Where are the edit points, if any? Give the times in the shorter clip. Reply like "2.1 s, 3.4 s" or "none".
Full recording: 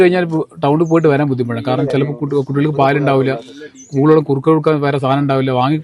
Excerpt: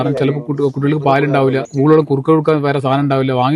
1.7 s